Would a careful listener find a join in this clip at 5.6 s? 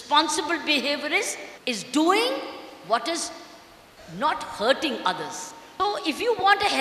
yes; 2 cuts; at 1.5 s, 5.6 s

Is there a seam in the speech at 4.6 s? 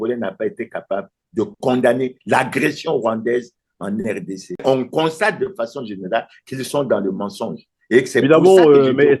yes; 1 cut; at 4.6 s

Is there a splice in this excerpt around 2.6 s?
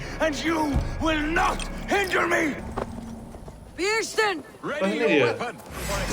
yes; 1 cut; at 2.6 s

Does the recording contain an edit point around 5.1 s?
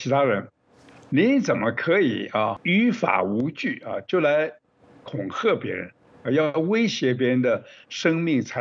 no; 1 cut; at 2.6 s

